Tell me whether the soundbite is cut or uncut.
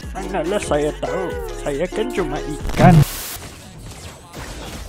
cut